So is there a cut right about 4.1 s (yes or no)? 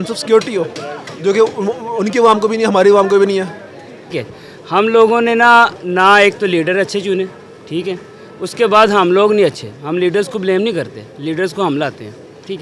yes